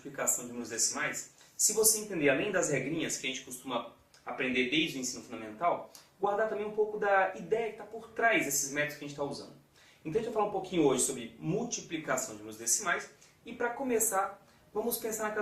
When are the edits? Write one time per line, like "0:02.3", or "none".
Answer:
0:10.6